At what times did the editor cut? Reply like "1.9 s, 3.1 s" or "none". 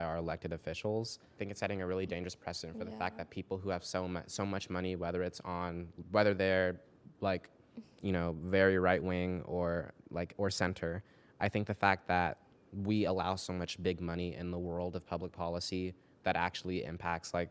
1.3 s